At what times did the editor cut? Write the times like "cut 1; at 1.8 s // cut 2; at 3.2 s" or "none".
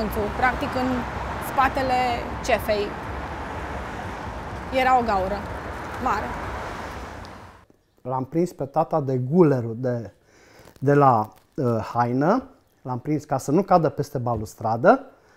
cut 1; at 7.6 s